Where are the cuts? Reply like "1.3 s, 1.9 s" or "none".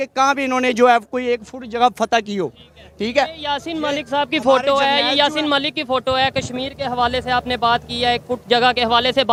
none